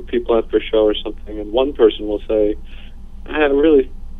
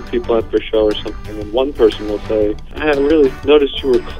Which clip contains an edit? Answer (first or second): second